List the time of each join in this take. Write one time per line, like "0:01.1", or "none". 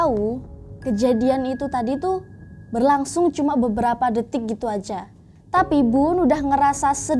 none